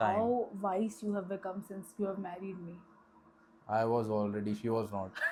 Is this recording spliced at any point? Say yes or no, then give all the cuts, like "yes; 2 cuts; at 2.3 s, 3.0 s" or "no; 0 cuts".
no; 0 cuts